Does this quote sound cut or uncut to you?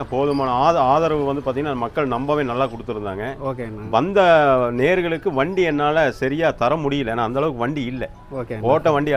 uncut